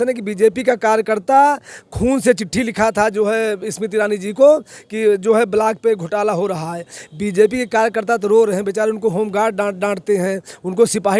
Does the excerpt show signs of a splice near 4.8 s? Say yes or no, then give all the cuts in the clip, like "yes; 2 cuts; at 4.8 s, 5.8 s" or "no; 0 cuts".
no; 0 cuts